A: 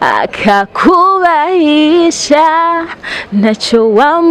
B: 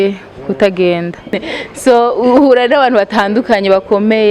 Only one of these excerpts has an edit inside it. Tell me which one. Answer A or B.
B